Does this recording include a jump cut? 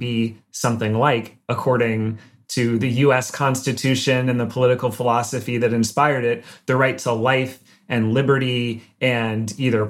no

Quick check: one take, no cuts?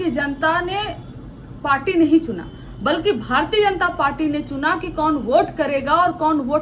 yes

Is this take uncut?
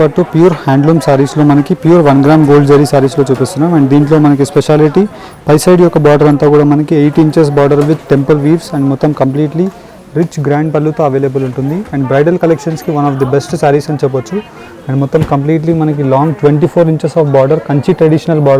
yes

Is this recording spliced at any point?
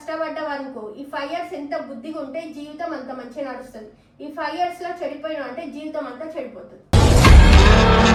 no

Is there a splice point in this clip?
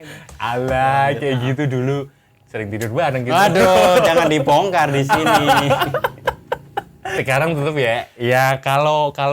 yes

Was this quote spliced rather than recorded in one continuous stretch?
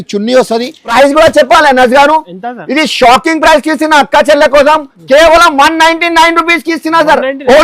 yes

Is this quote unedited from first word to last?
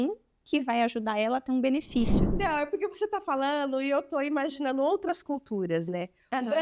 no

